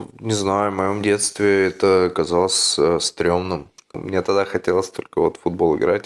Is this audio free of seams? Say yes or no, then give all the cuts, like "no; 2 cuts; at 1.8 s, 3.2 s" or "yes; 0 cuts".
no; 1 cut; at 4.0 s